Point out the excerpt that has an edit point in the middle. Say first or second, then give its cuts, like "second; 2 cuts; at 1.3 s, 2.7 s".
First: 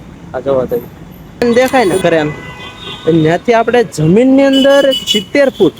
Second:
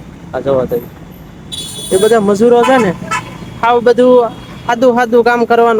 first; 1 cut; at 1.4 s